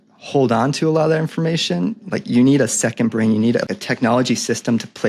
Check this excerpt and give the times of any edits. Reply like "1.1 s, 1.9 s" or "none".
3.8 s